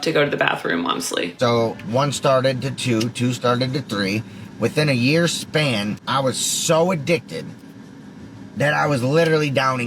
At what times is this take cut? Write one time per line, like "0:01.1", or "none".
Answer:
0:01.3
0:05.9